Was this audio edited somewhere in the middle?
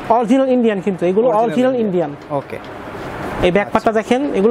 no; 0 cuts

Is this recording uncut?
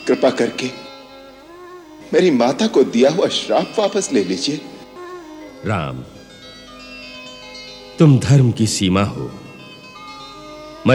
no; 1 cut; at 4.9 s

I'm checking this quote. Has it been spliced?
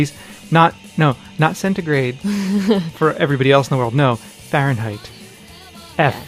no; 0 cuts

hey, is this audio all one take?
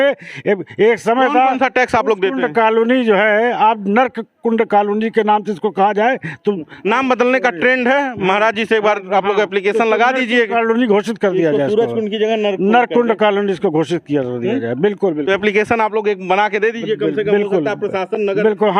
yes; 0 cuts

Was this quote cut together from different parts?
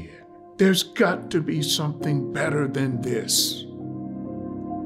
yes; 1 cut; at 3.3 s

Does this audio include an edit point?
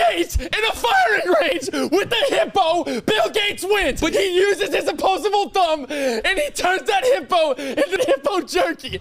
yes; 2 cuts; at 4.1 s, 8.0 s

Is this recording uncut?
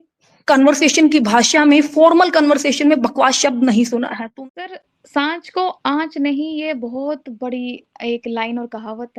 no; 1 cut; at 4.2 s

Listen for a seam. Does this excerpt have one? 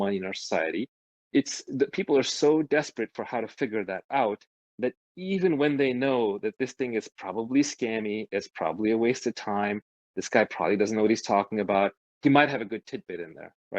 yes; 1 cut; at 1.1 s

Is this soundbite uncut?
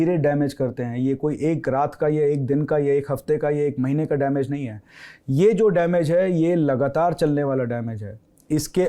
yes; 0 cuts

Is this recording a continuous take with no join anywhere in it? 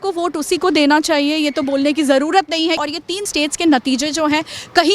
no; 1 cut; at 2.9 s

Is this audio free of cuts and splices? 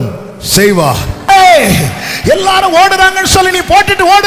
no; 1 cut; at 1.3 s

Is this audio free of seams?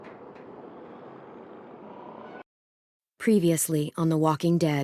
no; 1 cut; at 2.4 s

